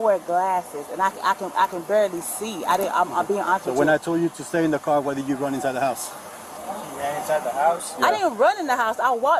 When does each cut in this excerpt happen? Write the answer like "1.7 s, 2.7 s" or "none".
none